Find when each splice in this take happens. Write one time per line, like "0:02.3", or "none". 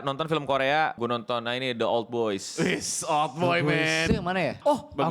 0:01.0
0:04.1